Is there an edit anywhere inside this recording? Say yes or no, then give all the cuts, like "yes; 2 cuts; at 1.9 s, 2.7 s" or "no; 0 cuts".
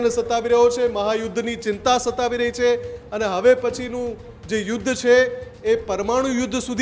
no; 0 cuts